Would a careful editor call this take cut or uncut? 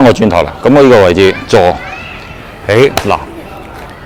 uncut